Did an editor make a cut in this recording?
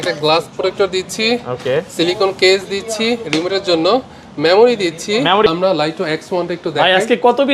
yes; 1 cut; at 5.5 s

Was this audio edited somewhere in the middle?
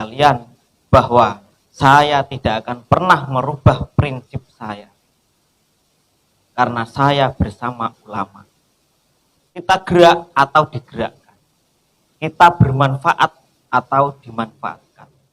yes; 1 cut; at 9.6 s

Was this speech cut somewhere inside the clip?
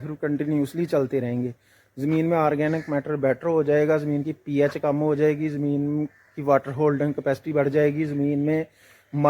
yes; 1 cut; at 1.3 s

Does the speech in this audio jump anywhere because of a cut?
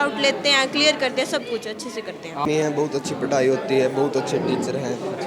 yes; 1 cut; at 2.5 s

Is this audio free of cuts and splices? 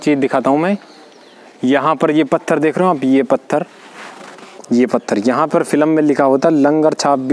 yes; 0 cuts

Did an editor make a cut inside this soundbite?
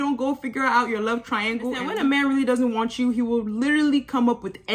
yes; 1 cut; at 1.9 s

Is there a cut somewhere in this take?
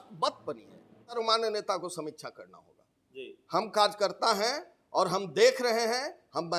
yes; 1 cut; at 1.2 s

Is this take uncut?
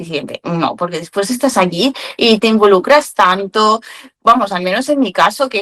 no; 1 cut; at 2.4 s

